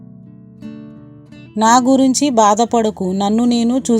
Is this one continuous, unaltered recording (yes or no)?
no